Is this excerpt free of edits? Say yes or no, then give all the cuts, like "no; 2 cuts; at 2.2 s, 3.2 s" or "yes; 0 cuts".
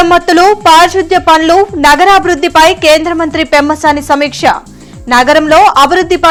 yes; 0 cuts